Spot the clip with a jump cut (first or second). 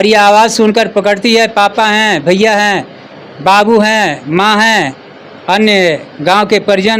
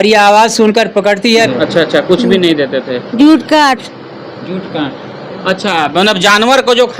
second